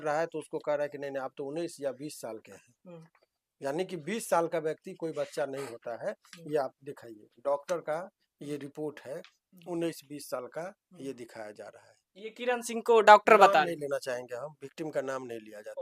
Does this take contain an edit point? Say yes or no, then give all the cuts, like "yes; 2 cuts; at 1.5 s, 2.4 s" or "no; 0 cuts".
no; 0 cuts